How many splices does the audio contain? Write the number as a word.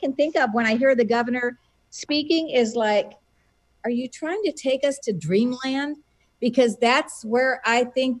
zero